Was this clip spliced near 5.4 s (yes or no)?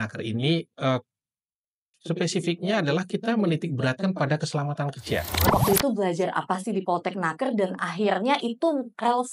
yes